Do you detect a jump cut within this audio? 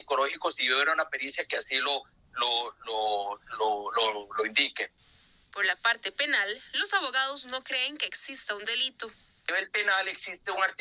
no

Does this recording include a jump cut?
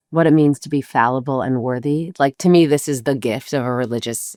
no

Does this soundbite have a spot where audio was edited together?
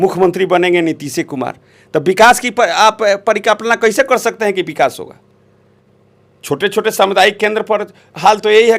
no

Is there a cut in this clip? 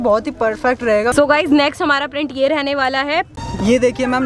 yes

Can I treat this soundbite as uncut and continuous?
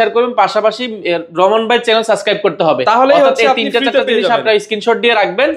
yes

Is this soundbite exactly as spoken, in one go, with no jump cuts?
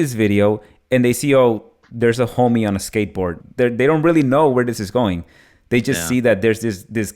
no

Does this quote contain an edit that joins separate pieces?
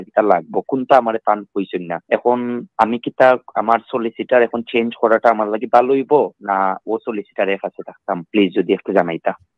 yes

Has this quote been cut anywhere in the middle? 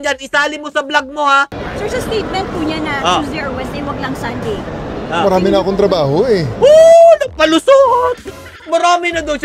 yes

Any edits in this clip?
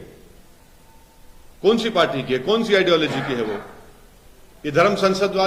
no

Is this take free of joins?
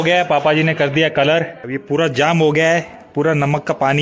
no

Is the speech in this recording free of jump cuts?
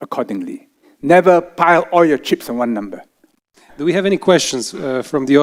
yes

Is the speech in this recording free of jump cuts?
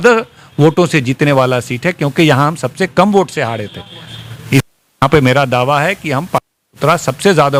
yes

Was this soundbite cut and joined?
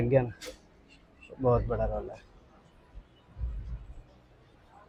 no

